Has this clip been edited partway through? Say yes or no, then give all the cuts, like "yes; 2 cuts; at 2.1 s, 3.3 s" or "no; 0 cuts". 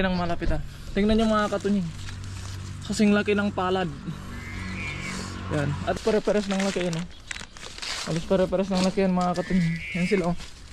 yes; 1 cut; at 6.0 s